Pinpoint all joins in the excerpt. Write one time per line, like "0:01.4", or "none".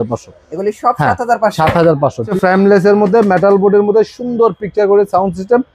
0:02.3